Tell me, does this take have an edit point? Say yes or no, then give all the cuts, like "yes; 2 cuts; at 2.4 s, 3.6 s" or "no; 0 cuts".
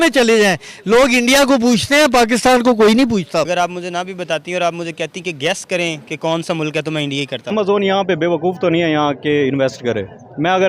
yes; 2 cuts; at 3.5 s, 7.5 s